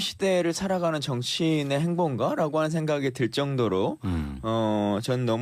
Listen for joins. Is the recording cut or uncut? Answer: uncut